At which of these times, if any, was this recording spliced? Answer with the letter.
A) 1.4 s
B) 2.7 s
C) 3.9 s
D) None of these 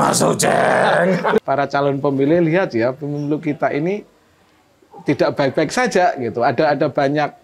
A